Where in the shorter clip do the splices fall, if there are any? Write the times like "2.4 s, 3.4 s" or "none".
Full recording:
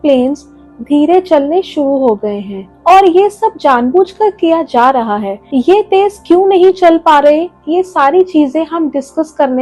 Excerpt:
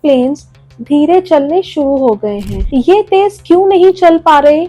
2.6 s